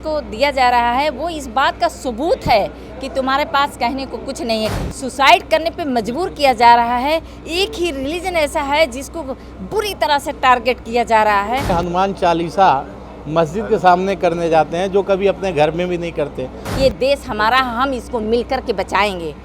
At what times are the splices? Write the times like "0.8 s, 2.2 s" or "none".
4.7 s, 11.7 s, 16.6 s